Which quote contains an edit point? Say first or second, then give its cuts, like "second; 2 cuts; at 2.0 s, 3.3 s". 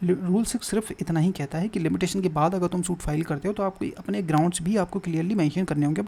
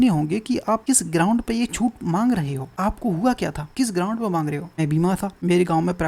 second; 4 cuts; at 0.8 s, 2.6 s, 3.6 s, 5.1 s